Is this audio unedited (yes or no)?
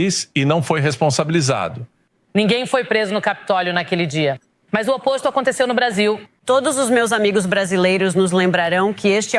no